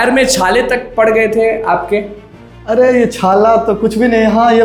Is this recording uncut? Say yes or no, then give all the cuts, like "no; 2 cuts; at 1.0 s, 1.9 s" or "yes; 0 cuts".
yes; 0 cuts